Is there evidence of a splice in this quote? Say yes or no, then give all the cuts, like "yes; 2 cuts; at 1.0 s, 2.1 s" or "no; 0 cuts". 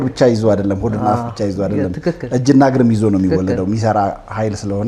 no; 0 cuts